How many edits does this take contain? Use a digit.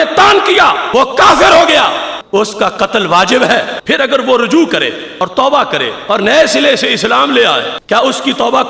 6